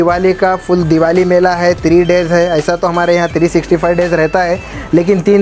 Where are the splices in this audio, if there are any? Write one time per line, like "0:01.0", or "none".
none